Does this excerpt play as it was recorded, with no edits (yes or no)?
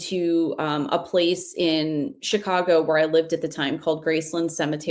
yes